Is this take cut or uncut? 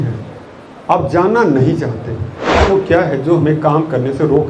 cut